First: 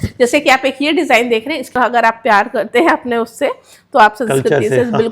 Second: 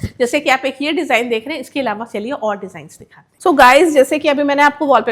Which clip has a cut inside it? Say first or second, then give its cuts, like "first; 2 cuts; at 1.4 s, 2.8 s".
first; 1 cut; at 1.7 s